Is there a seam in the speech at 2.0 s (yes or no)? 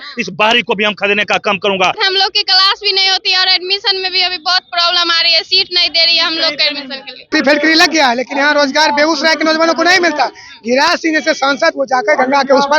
yes